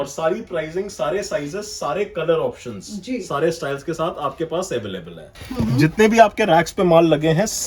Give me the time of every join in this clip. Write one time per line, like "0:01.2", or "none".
0:05.4